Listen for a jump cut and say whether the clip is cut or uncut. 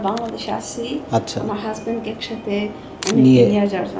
uncut